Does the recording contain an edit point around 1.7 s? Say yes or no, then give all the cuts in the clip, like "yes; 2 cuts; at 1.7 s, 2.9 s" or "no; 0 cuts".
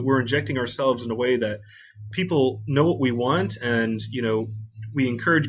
no; 0 cuts